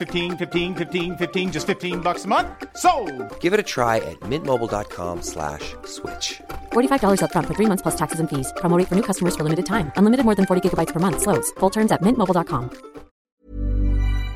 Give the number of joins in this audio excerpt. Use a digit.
1